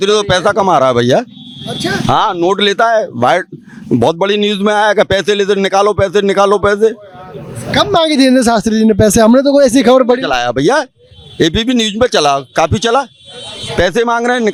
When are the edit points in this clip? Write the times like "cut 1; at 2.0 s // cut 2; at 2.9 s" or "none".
none